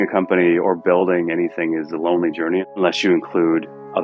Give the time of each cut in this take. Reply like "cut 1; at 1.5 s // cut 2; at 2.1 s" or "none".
none